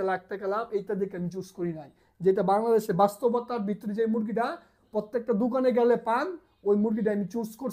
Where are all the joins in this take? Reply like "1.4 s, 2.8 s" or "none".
none